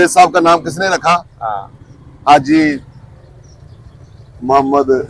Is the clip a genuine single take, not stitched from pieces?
yes; 0 cuts

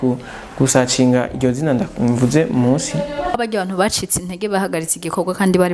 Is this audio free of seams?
no; 1 cut; at 3.4 s

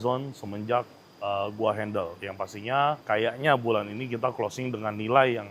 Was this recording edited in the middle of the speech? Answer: no; 0 cuts

